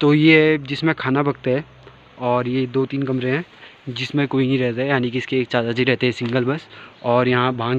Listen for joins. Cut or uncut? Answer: uncut